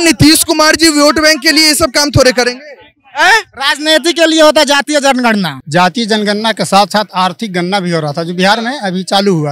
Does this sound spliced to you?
yes; 1 cut; at 5.6 s

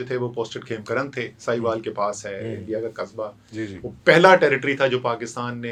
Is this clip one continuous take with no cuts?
yes; 0 cuts

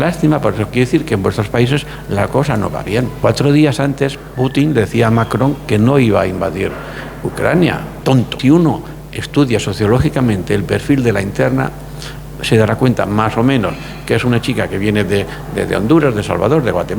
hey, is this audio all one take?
no; 2 cuts; at 3.1 s, 8.3 s

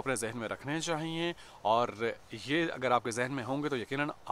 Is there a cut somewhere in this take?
no; 0 cuts

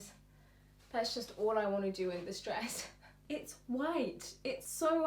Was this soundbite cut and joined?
yes; 1 cut; at 3.1 s

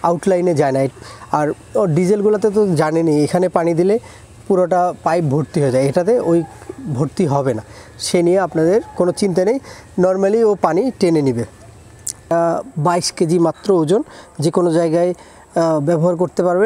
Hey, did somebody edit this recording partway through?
yes; 2 cuts; at 0.9 s, 12.3 s

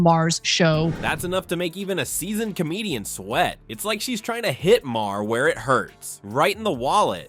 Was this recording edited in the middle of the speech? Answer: no; 0 cuts

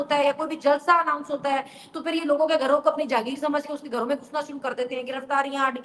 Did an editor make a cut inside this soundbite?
no; 0 cuts

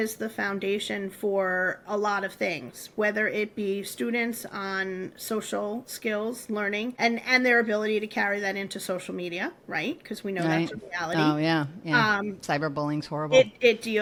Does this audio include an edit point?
no; 0 cuts

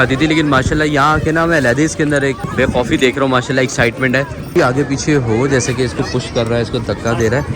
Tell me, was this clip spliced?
yes; 2 cuts; at 2.4 s, 4.4 s

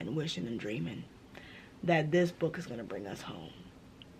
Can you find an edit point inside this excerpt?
no; 0 cuts

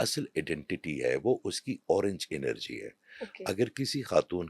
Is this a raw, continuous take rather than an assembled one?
yes; 0 cuts

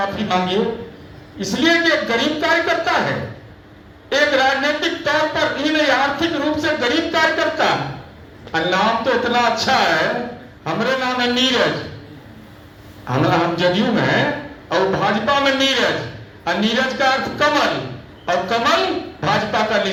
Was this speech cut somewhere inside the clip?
no; 0 cuts

